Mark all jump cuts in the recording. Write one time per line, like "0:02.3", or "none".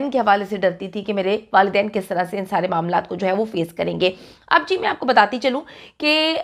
none